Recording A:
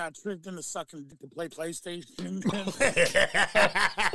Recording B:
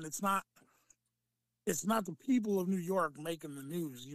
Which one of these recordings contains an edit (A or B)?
A